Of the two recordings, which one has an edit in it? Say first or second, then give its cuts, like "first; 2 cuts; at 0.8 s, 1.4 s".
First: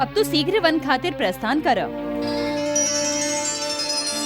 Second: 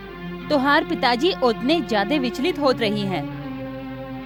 first; 1 cut; at 2.1 s